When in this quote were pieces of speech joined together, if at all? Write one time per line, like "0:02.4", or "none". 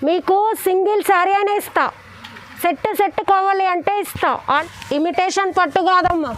0:04.6